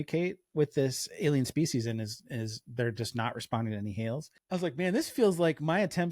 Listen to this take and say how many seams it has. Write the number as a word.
one